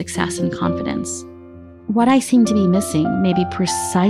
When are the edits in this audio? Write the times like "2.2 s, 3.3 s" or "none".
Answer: 1.1 s